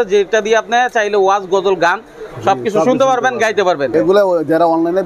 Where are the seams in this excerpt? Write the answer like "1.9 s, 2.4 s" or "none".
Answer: 3.9 s